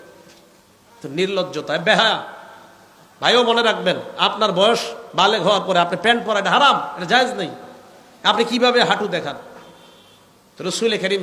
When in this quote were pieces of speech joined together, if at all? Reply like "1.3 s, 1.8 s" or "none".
none